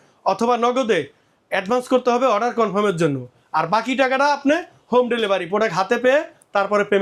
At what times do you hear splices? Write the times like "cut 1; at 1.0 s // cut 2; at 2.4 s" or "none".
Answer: none

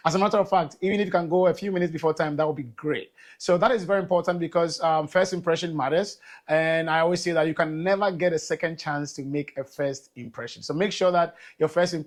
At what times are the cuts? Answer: none

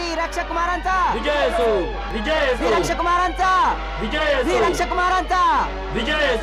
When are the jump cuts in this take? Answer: cut 1; at 2.1 s

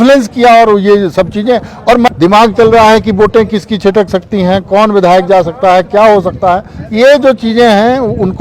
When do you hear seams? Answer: cut 1; at 2.1 s

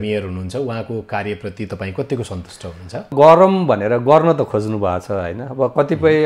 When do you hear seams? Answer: cut 1; at 3.1 s

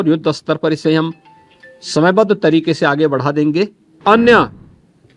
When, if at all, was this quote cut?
cut 1; at 4.0 s

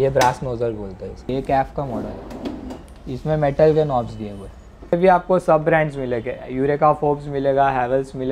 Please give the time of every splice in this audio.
cut 1; at 4.9 s

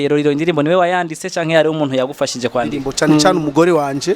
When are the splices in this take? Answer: cut 1; at 2.9 s

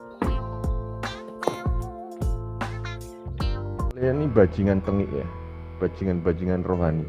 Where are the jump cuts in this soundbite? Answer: cut 1; at 4.0 s

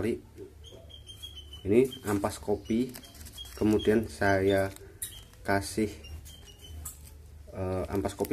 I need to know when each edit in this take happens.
none

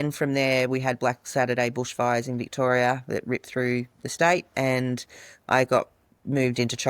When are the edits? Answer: none

